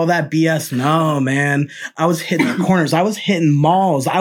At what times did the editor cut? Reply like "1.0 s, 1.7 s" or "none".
1.8 s